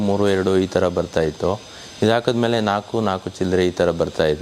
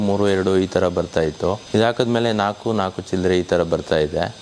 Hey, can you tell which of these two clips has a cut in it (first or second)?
second